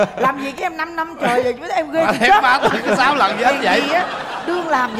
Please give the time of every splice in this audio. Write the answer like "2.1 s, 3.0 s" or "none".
none